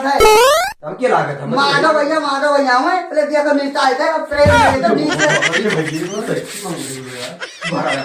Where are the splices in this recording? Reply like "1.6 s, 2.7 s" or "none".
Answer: none